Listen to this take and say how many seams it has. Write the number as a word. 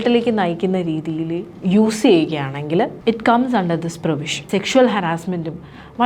three